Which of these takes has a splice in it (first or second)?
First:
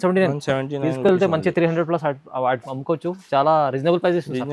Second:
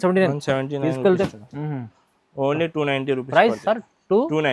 second